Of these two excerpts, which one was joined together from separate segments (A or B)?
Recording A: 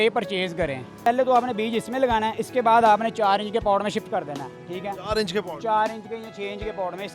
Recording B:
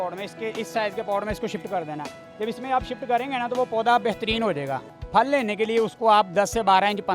A